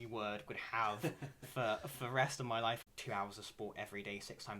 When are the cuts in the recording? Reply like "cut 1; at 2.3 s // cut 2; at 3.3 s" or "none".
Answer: cut 1; at 2.9 s

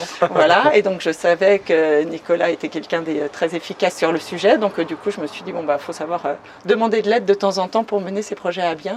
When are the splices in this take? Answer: none

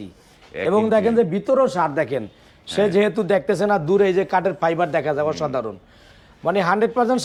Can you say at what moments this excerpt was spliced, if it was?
none

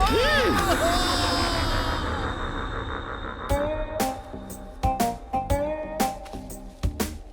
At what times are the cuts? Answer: none

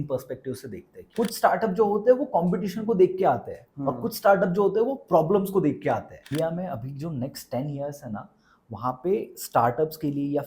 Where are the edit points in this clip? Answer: cut 1; at 1.1 s // cut 2; at 6.2 s

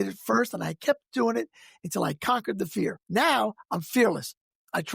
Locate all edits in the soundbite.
cut 1; at 3.0 s

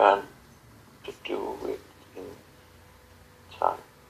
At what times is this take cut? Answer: none

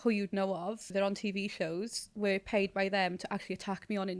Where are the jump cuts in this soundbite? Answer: cut 1; at 0.9 s

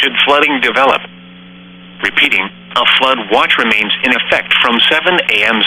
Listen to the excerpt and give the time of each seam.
cut 1; at 4.8 s

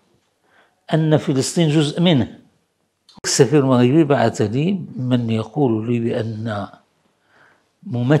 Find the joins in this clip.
cut 1; at 3.2 s

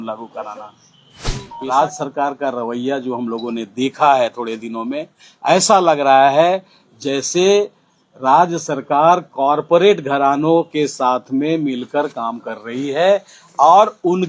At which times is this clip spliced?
cut 1; at 1.5 s

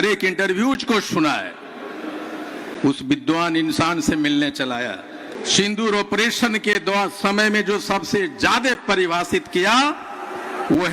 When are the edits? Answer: cut 1; at 5.3 s

